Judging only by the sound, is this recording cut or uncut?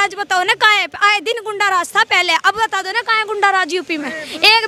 uncut